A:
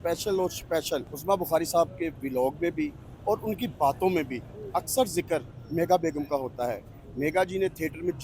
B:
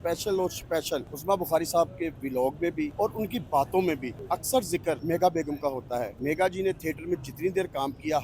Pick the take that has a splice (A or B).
B